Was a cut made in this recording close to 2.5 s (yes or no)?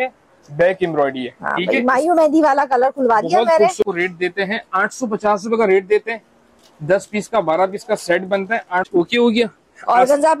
no